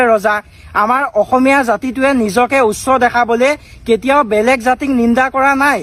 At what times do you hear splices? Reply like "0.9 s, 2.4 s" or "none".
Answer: none

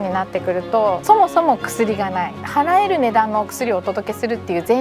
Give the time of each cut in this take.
0.9 s, 2.3 s

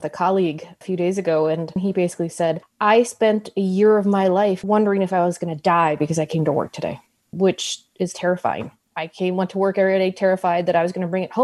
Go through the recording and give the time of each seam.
1.8 s, 4.6 s, 8.8 s

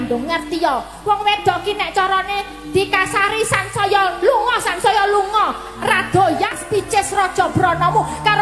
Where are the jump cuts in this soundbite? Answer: 6.6 s

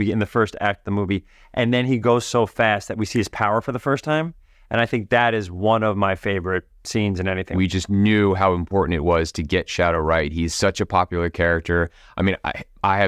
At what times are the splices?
7.5 s

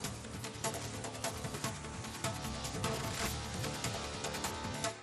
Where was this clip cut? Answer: none

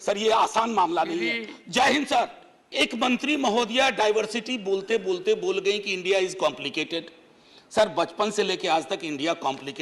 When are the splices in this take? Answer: 2.7 s

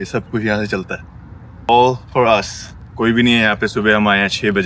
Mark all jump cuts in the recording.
none

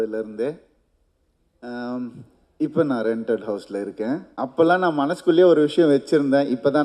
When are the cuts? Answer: 4.3 s

